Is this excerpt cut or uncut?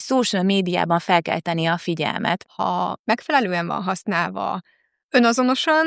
cut